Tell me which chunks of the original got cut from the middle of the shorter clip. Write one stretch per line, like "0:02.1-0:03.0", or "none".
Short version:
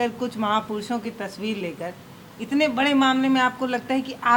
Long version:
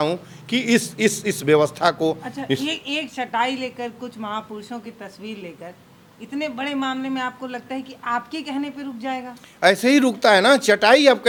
none